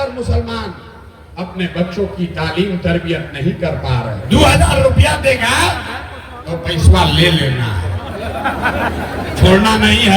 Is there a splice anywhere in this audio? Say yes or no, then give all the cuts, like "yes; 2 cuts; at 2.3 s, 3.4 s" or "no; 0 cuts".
yes; 1 cut; at 4.2 s